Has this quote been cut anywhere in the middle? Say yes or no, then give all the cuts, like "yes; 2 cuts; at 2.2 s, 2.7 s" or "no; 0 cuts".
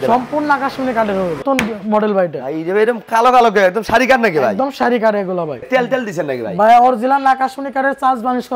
yes; 2 cuts; at 1.4 s, 5.6 s